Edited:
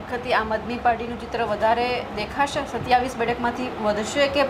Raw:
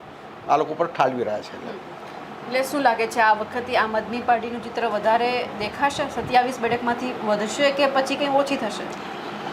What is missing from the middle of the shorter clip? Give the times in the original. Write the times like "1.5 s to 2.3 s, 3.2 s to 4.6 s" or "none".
none